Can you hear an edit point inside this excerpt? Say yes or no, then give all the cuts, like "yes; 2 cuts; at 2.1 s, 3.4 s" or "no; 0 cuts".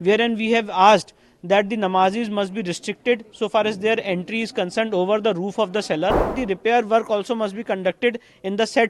yes; 1 cut; at 6.4 s